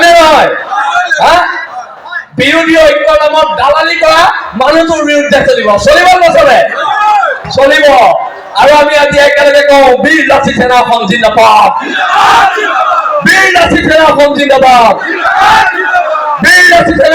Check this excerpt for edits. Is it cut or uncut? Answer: uncut